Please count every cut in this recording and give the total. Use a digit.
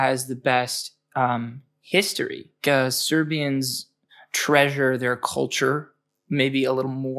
1